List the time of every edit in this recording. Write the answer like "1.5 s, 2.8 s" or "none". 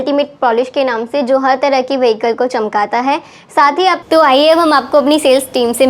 4.0 s